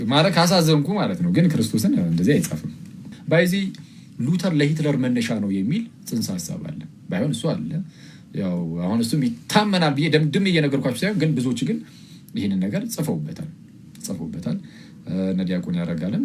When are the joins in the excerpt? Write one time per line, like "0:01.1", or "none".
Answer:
0:03.2